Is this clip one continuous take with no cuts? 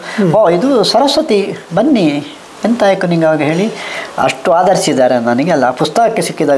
yes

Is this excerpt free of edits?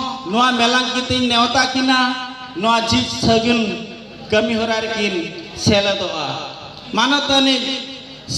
no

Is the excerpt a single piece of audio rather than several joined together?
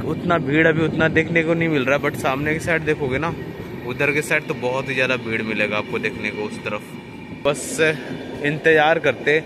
no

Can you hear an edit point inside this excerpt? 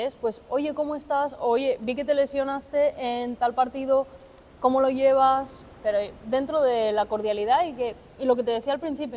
no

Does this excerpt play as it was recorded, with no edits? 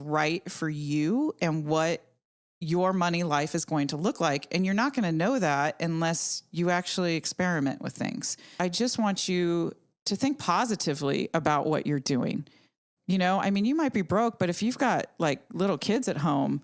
no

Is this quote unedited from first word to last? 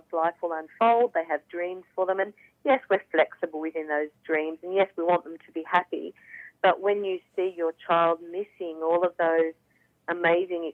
yes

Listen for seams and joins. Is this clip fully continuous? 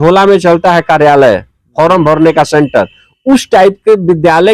yes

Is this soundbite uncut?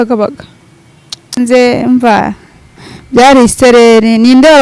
no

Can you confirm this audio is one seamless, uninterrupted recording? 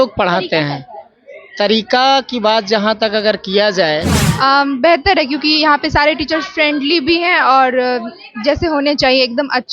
no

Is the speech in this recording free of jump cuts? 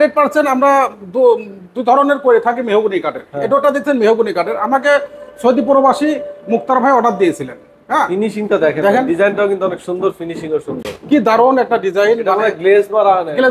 yes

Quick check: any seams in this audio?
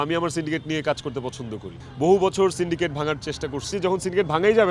yes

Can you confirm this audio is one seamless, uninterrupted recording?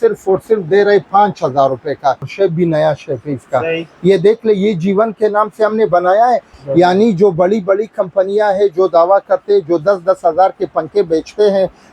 no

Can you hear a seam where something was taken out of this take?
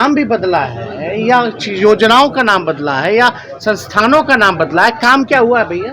no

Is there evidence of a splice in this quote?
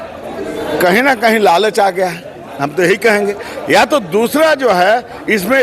no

